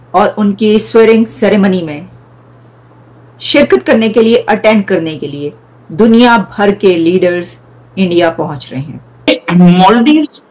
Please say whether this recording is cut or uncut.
cut